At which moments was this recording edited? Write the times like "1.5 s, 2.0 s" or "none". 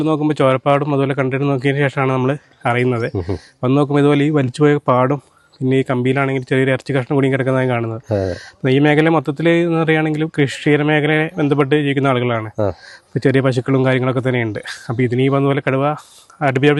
none